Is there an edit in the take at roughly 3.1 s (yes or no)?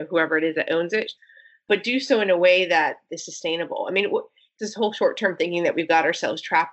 no